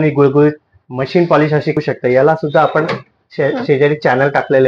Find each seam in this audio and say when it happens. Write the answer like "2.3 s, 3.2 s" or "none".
1.8 s